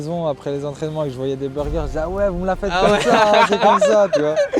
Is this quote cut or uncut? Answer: uncut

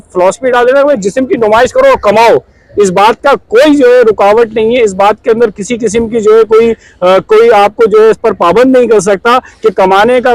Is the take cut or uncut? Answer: uncut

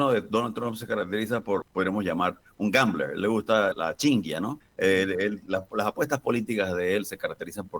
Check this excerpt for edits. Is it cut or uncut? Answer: cut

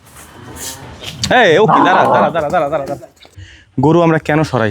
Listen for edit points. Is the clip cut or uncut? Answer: cut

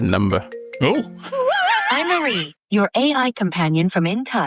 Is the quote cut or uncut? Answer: cut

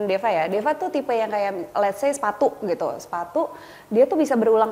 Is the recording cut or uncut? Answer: uncut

